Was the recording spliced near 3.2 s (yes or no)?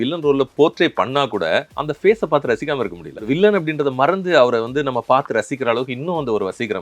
yes